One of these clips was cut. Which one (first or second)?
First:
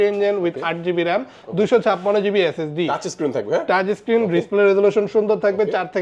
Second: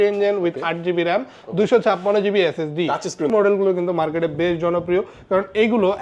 second